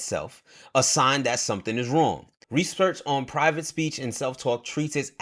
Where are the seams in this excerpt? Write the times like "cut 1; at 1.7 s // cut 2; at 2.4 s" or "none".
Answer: cut 1; at 2.3 s

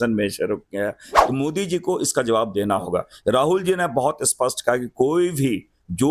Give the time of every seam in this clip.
cut 1; at 1.1 s

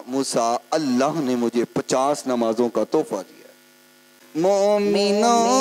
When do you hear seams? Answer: cut 1; at 4.2 s

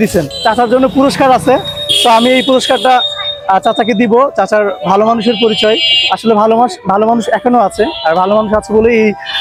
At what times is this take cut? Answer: none

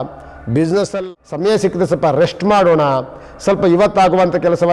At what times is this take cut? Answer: cut 1; at 0.9 s

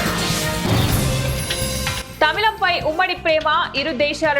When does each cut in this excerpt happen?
cut 1; at 2.0 s

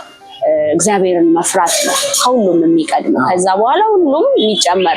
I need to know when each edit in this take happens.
none

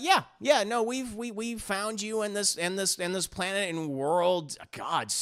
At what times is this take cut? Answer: none

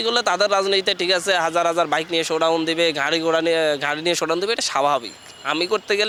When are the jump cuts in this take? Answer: none

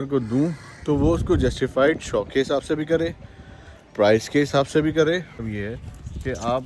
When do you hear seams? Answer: cut 1; at 5.4 s

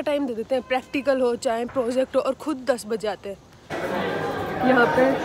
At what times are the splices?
cut 1; at 3.7 s

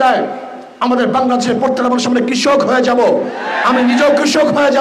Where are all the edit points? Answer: none

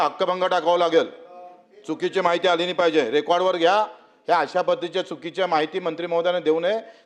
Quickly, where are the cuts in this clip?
none

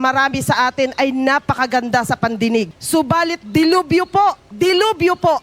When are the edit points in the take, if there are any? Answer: cut 1; at 2.8 s // cut 2; at 4.5 s

